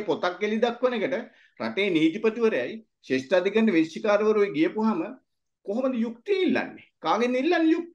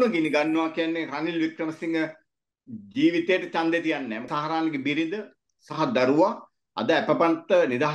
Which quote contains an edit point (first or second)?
second